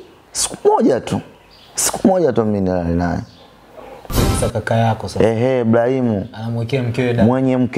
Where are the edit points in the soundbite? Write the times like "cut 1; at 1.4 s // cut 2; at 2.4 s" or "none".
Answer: cut 1; at 4.2 s